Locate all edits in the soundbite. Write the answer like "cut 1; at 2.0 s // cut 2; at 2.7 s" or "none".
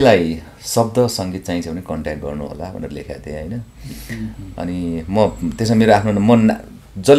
none

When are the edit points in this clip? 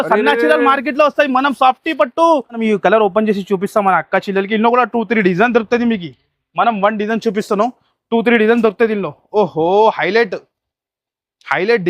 cut 1; at 2.6 s

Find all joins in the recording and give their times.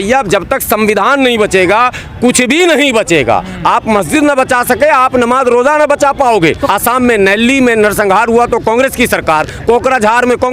cut 1; at 6.6 s

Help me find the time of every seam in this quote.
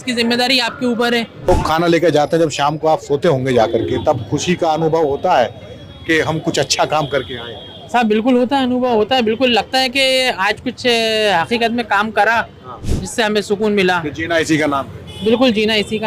cut 1; at 1.5 s

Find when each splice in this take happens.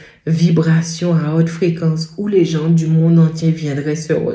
none

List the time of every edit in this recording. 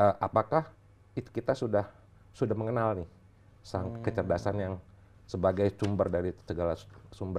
none

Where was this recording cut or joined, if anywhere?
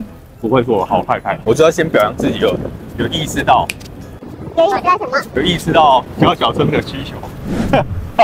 cut 1; at 1.3 s // cut 2; at 6.1 s

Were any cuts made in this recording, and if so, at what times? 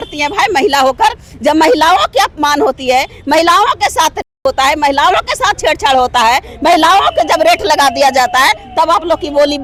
none

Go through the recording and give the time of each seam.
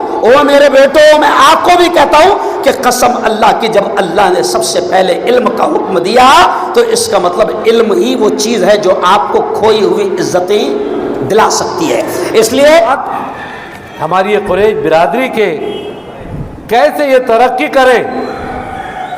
cut 1; at 12.9 s

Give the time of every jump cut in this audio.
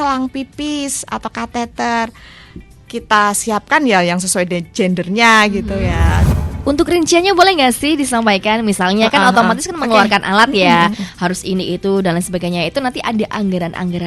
cut 1; at 6.3 s

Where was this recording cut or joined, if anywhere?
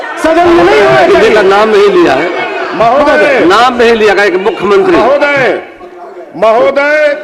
none

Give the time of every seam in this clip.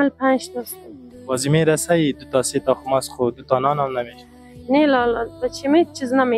none

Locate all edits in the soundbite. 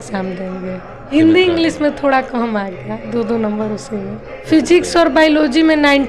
cut 1; at 1.0 s // cut 2; at 4.3 s

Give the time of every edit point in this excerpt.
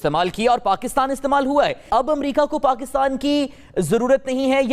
cut 1; at 1.9 s

